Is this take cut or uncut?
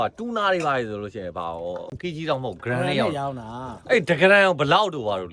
cut